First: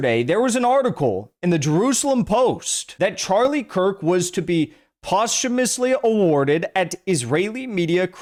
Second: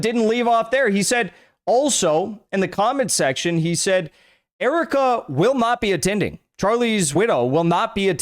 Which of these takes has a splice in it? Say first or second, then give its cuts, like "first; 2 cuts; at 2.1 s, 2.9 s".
second; 1 cut; at 7.1 s